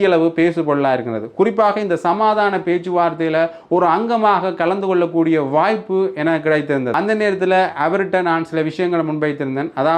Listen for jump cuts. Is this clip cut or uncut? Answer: cut